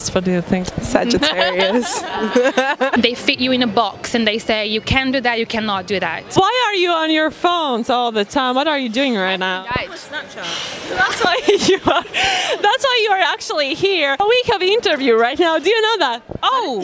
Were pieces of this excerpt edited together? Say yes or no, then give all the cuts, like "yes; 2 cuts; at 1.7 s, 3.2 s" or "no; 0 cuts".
yes; 3 cuts; at 2.9 s, 6.2 s, 14.2 s